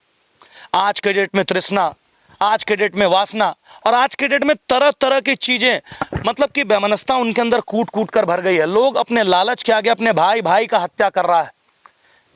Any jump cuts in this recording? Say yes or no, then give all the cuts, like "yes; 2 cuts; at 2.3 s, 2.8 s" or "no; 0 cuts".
no; 0 cuts